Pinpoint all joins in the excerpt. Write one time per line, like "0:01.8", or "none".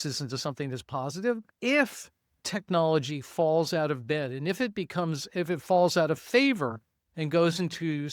0:01.5